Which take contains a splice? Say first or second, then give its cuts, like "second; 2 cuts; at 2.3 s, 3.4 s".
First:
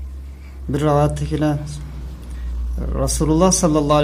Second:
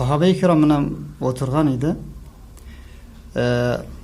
second; 1 cut; at 1.4 s